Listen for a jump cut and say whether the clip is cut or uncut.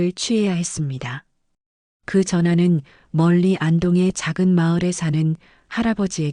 cut